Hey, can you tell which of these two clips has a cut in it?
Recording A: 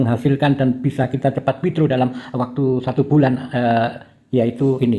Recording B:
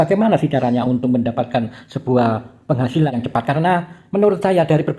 B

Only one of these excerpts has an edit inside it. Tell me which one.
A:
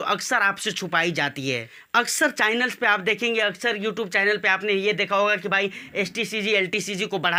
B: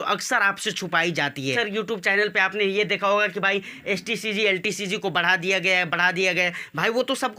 B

